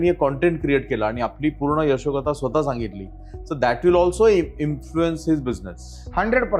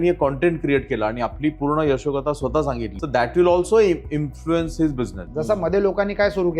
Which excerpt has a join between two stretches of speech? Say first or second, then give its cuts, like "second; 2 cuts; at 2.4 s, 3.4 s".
second; 2 cuts; at 2.9 s, 5.2 s